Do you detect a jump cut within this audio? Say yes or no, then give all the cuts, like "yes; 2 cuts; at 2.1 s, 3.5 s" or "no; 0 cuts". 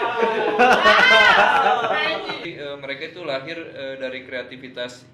yes; 1 cut; at 2.5 s